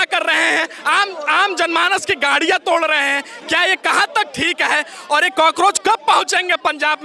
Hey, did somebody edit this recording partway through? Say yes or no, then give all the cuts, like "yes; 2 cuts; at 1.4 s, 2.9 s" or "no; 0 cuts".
no; 0 cuts